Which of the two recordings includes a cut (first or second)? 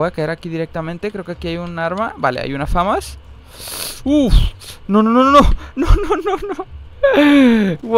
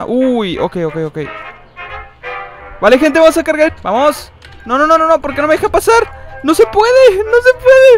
second